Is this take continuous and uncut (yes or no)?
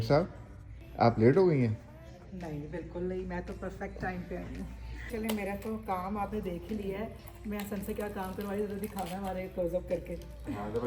no